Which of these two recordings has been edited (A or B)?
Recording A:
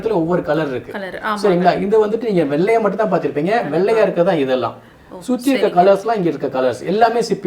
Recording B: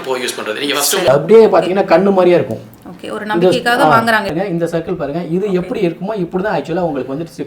B